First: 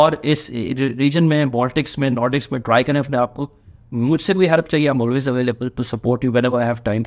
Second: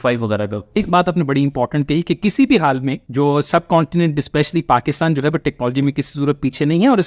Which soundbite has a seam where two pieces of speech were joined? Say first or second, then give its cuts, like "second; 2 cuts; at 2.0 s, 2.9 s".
second; 2 cuts; at 0.8 s, 3.0 s